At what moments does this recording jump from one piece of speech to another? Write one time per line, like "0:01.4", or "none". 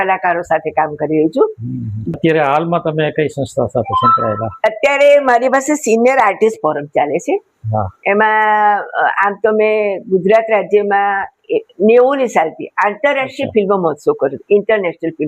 0:02.1